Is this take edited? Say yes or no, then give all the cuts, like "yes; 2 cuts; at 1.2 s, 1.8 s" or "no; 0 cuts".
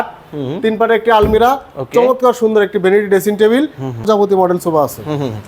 yes; 1 cut; at 4.2 s